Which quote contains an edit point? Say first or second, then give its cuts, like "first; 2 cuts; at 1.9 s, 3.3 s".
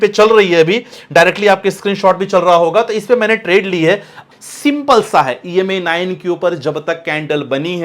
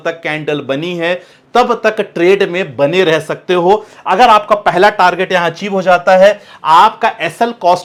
first; 1 cut; at 4.2 s